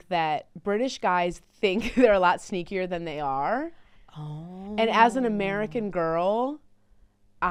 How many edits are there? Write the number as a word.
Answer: zero